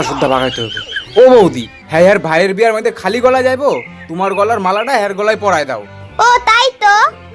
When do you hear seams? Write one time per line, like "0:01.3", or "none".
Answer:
none